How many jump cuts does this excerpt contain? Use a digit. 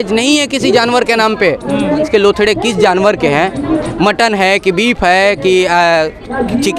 2